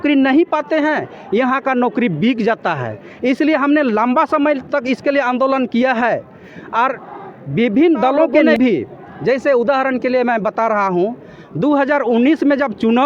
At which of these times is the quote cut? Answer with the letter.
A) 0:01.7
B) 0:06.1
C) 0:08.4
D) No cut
C